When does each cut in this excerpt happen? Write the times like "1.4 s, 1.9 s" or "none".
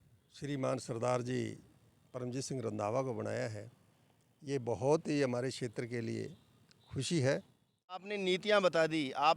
8.1 s

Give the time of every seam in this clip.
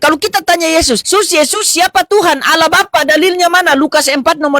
1.0 s

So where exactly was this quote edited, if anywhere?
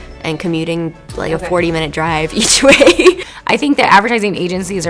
3.3 s

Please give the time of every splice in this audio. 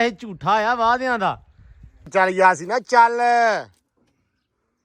2.1 s

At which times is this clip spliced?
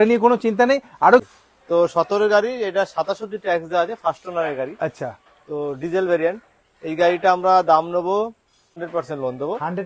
1.3 s, 8.8 s

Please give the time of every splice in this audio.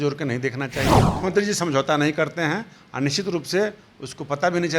1.1 s

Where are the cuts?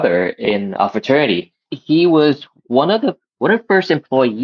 none

